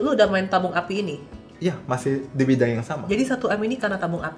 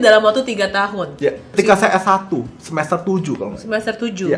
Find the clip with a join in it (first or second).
second